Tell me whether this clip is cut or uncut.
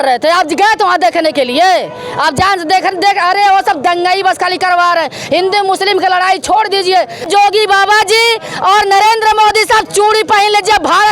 cut